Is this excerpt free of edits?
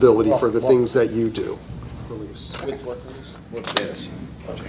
no; 1 cut; at 2.3 s

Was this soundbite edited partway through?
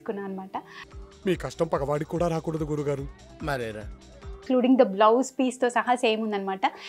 yes; 1 cut; at 4.5 s

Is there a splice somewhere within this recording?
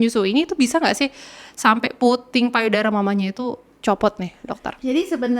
no; 0 cuts

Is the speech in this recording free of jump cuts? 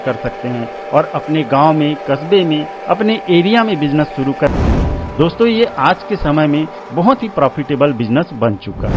no; 1 cut; at 4.5 s

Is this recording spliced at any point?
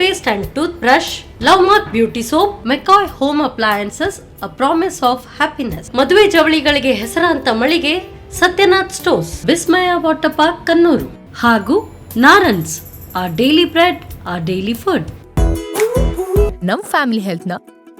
yes; 1 cut; at 15.2 s

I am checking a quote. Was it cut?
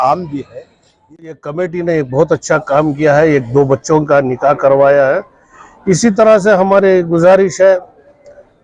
yes; 1 cut; at 1.3 s

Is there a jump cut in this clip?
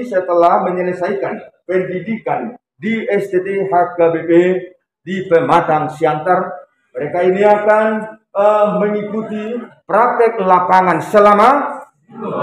yes; 1 cut; at 9.7 s

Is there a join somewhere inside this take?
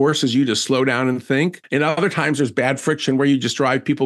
yes; 1 cut; at 1.6 s

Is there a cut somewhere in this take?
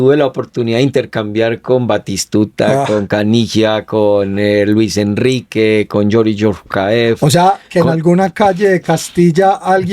no; 0 cuts

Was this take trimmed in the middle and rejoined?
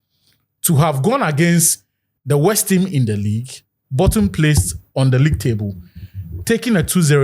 no; 0 cuts

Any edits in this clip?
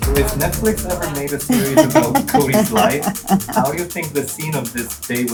no; 0 cuts

